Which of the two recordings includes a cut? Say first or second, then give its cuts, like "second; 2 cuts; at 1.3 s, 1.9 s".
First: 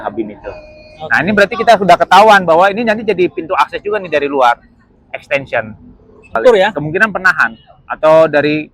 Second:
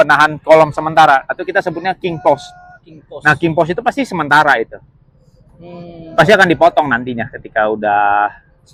first; 1 cut; at 6.4 s